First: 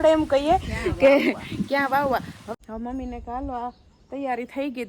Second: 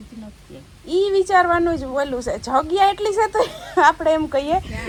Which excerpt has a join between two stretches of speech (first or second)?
first